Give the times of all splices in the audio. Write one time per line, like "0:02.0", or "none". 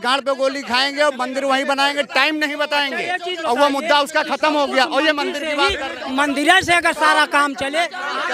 none

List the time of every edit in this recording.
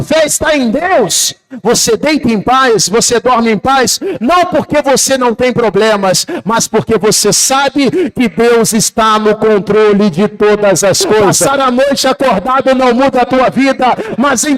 0:11.4

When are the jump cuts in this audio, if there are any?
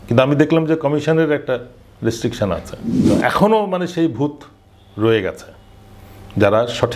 0:03.0

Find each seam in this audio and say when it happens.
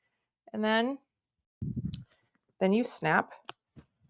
0:01.6

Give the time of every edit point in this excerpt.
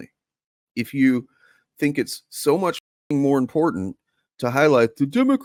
none

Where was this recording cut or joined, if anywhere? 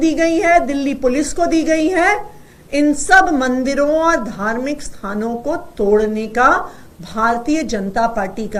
none

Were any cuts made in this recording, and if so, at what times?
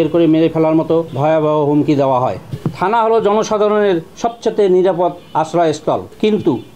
0:01.1
0:02.5

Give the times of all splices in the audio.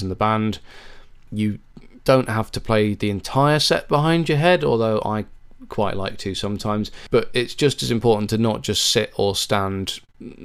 0:07.0

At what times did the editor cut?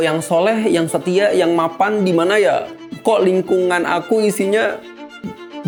none

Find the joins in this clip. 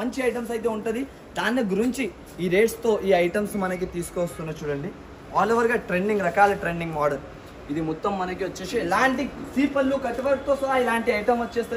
none

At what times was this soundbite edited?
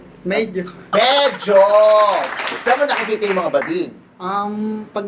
0:02.3

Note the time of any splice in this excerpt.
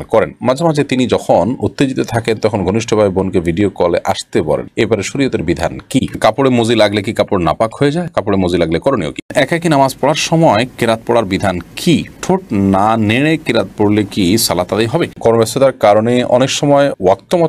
0:06.1
0:09.2
0:15.2

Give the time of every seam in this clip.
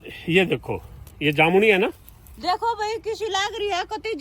none

